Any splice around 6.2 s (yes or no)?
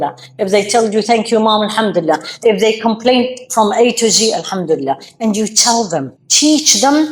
yes